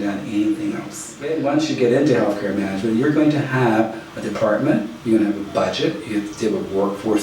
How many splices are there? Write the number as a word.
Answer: one